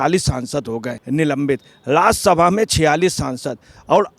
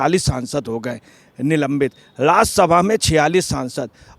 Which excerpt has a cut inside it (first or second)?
first